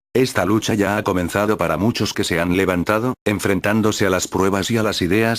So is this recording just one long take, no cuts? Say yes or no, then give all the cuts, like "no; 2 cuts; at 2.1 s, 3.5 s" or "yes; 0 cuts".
no; 1 cut; at 3.3 s